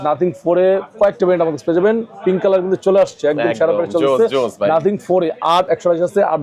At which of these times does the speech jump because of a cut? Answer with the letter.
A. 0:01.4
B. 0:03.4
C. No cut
C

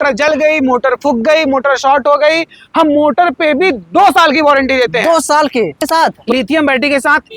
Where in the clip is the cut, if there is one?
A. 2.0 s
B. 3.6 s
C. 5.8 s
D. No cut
C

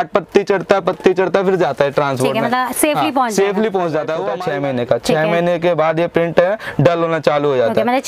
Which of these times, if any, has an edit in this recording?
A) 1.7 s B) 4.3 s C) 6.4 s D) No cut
B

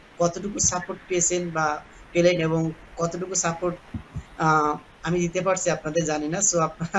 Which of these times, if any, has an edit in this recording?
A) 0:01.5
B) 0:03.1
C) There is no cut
C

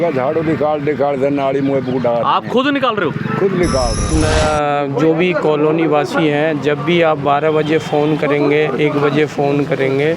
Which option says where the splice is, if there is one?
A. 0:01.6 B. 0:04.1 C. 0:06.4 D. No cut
B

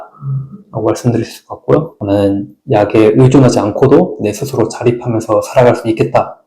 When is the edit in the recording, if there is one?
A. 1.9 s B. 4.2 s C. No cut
A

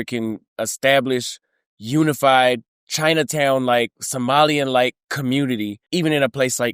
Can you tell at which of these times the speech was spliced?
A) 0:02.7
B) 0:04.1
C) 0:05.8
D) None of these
C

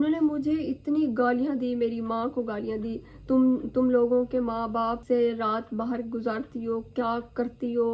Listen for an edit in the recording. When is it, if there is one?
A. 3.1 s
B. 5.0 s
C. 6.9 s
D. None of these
B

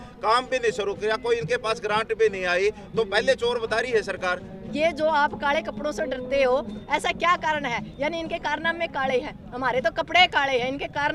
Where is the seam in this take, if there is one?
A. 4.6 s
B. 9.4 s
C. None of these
A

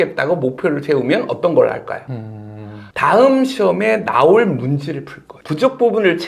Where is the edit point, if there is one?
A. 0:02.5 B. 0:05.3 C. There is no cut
C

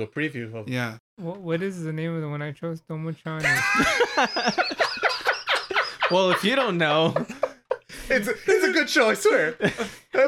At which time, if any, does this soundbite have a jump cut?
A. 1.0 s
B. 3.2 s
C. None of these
A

